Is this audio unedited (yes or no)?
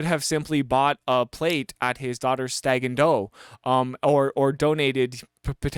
yes